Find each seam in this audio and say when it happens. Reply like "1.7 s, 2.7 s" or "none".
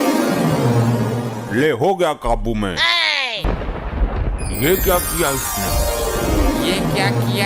3.5 s